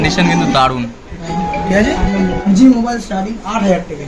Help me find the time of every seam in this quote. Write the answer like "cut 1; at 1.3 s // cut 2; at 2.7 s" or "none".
cut 1; at 2.5 s

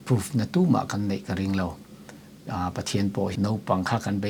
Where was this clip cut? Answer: cut 1; at 3.3 s

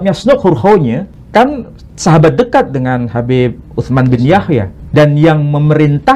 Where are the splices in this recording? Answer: cut 1; at 1.1 s // cut 2; at 4.8 s

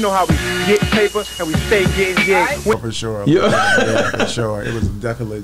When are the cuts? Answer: cut 1; at 2.0 s

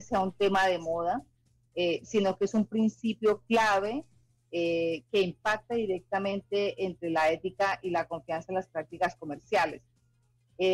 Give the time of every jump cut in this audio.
none

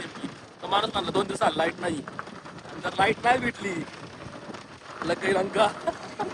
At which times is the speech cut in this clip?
none

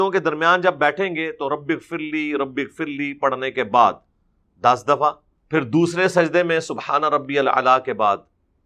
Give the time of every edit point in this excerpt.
cut 1; at 5.3 s

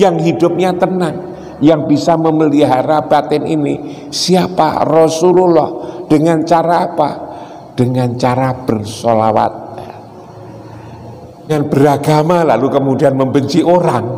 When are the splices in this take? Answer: cut 1; at 11.5 s

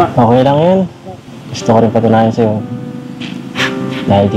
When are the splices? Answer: none

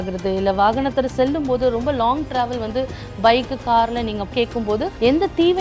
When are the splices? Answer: cut 1; at 4.3 s

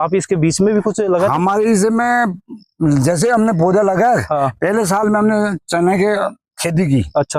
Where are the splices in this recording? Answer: none

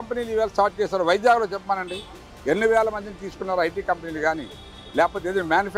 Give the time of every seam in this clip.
none

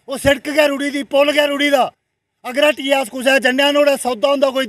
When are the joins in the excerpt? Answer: none

